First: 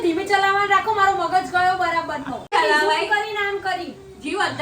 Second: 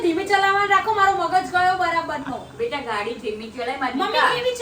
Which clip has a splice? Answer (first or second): first